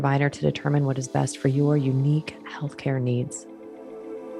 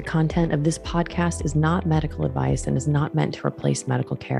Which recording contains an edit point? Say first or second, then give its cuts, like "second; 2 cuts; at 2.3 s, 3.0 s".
first; 1 cut; at 3.4 s